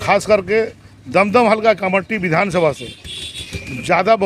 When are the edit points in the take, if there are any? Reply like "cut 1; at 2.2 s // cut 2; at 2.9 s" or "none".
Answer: none